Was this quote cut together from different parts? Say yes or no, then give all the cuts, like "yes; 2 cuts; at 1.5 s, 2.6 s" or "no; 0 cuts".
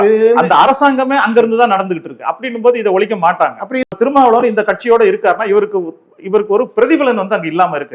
yes; 1 cut; at 3.9 s